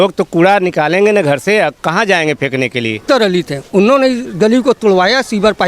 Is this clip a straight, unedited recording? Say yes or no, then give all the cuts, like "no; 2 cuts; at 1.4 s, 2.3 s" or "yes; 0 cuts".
no; 1 cut; at 3.0 s